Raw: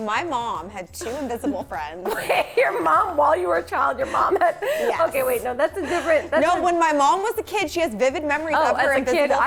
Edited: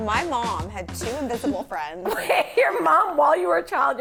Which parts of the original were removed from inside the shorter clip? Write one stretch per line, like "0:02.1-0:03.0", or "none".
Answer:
none